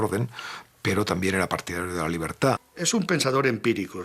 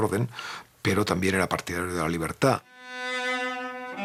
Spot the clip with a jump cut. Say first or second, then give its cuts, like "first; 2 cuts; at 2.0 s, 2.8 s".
first; 1 cut; at 2.7 s